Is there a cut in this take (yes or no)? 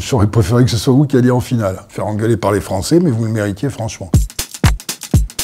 no